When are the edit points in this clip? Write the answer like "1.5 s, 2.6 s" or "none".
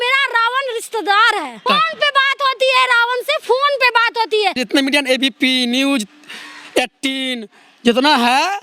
1.6 s, 4.6 s